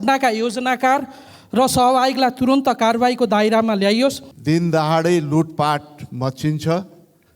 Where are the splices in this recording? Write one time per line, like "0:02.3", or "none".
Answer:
0:04.3